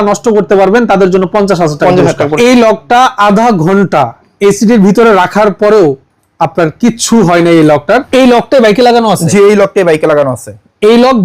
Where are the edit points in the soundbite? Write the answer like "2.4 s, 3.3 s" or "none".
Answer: 2.3 s, 8.1 s